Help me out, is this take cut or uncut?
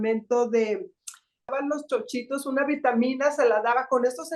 cut